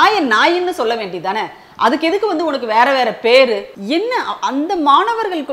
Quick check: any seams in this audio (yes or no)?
yes